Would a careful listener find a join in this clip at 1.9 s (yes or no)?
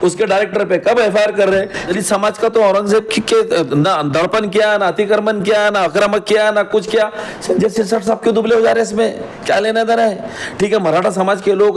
yes